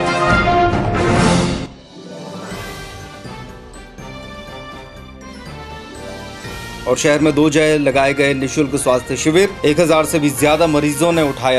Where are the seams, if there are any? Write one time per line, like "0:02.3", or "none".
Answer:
0:06.3